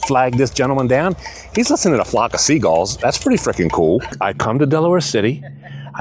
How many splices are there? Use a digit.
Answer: 1